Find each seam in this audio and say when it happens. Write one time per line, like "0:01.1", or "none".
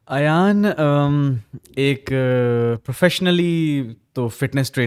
none